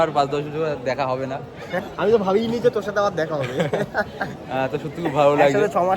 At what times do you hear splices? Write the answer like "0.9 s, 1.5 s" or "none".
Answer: 1.8 s